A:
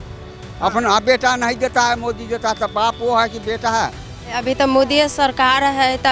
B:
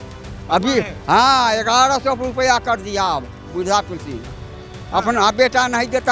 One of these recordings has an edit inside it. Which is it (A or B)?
A